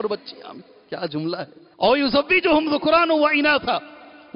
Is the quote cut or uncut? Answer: cut